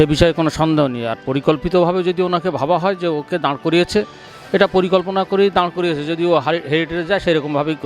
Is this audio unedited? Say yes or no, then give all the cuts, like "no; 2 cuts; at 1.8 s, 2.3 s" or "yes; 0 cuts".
yes; 0 cuts